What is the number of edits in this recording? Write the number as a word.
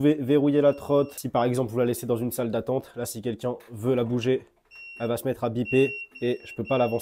one